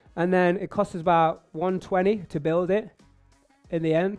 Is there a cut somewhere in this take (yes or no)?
no